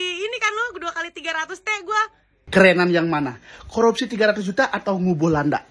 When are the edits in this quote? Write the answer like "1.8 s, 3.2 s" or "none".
2.5 s